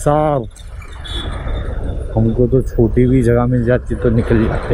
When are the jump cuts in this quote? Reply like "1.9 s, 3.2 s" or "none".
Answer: none